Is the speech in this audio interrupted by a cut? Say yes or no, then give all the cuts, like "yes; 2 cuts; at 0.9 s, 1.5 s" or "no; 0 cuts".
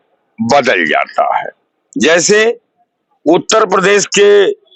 no; 0 cuts